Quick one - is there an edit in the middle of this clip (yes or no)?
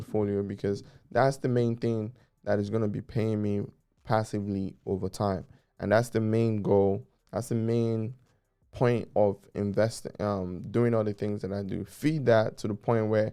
no